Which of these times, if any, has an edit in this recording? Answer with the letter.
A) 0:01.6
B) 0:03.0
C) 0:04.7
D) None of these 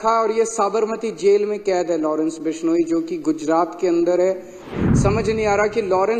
C